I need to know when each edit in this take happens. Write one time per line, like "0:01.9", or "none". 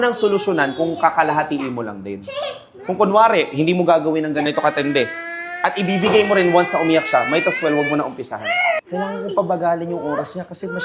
0:04.5
0:08.8